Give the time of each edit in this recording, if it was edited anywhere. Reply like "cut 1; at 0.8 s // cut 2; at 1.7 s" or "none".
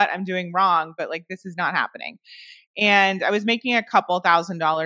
none

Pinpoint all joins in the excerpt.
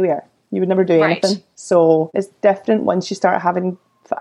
cut 1; at 1.5 s // cut 2; at 2.2 s

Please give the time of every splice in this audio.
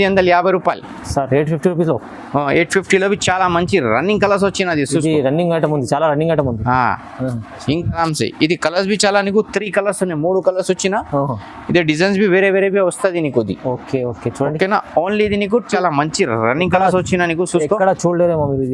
cut 1; at 8.0 s // cut 2; at 15.8 s

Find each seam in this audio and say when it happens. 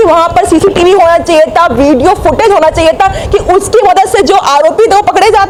none

